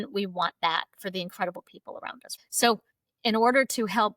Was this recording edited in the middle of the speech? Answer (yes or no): yes